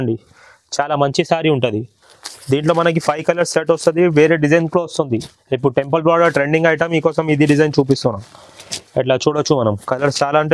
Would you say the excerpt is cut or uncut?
uncut